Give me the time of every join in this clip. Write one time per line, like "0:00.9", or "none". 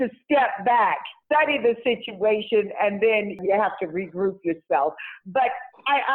0:01.1
0:03.4